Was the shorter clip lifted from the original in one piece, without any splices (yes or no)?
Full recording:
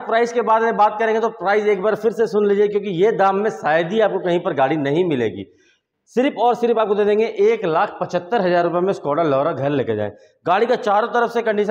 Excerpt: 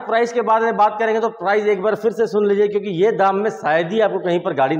yes